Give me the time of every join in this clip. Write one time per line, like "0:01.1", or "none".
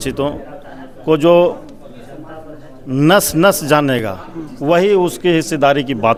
none